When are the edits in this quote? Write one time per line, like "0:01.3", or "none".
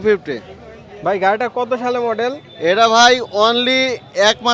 none